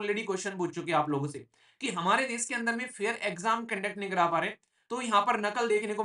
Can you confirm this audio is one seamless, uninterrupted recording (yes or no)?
yes